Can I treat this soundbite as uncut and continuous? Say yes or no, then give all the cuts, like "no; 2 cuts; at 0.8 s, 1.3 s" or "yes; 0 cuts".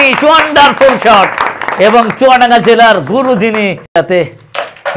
no; 2 cuts; at 1.1 s, 3.8 s